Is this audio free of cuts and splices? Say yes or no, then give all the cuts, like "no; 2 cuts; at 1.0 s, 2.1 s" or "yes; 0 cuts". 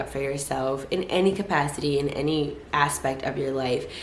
yes; 0 cuts